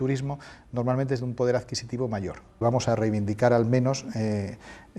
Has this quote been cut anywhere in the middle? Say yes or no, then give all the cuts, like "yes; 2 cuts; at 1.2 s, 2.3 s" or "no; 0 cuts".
yes; 1 cut; at 2.6 s